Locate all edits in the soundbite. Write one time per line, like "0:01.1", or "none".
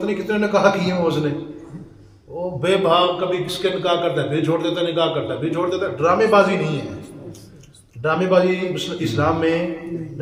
none